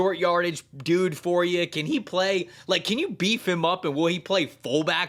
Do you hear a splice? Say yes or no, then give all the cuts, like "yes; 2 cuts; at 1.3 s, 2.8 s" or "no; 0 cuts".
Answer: no; 0 cuts